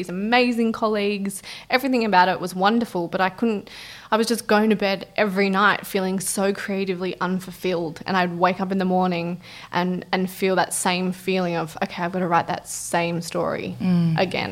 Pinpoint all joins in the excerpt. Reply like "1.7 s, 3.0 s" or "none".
none